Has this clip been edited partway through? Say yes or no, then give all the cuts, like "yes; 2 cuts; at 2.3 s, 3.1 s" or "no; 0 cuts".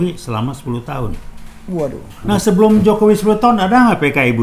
no; 0 cuts